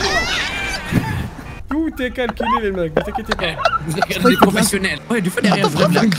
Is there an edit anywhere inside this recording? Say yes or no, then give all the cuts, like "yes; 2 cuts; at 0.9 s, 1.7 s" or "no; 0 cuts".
yes; 2 cuts; at 1.6 s, 5.0 s